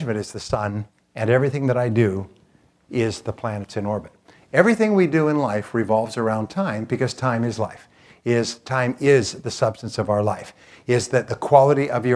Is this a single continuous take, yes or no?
yes